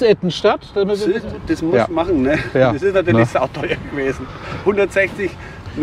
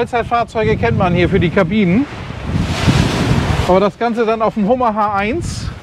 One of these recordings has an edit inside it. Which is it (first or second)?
first